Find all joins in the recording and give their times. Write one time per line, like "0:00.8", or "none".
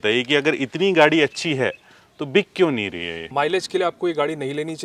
0:03.2